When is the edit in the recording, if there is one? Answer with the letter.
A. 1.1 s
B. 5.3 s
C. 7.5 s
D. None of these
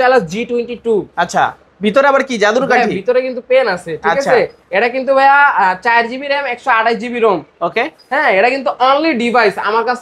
D